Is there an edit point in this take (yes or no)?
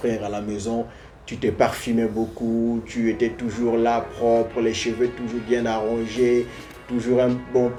no